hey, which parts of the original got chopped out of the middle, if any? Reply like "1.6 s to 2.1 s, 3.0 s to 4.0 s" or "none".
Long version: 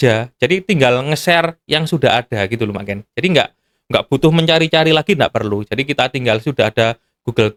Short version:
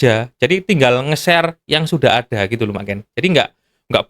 none